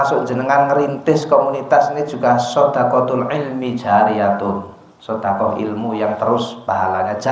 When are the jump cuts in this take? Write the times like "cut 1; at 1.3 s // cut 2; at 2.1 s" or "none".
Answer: none